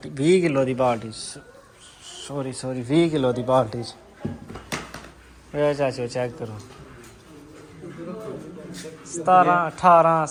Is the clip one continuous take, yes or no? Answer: yes